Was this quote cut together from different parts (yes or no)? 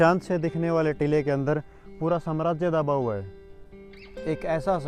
no